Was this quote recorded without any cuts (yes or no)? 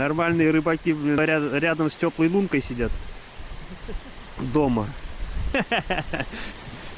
no